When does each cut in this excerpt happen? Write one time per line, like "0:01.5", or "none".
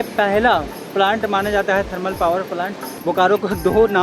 0:02.9